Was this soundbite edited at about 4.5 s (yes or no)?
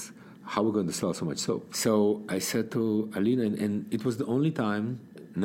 no